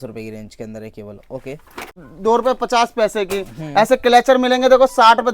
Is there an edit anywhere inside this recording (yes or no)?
yes